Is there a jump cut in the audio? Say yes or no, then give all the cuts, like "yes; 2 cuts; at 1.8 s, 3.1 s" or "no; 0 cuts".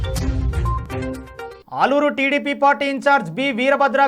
no; 0 cuts